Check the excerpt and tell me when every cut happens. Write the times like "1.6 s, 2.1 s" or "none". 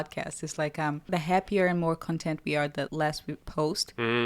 1.1 s, 3.0 s